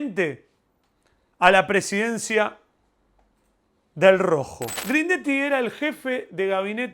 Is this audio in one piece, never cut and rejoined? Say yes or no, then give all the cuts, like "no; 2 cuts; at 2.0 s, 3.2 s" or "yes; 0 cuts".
no; 1 cut; at 4.7 s